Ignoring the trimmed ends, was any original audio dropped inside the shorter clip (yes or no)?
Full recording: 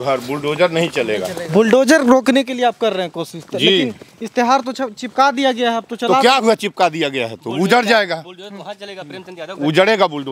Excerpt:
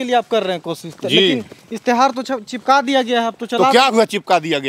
no